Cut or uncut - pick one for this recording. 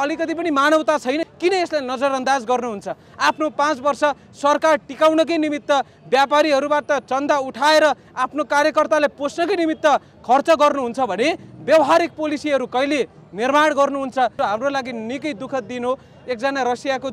cut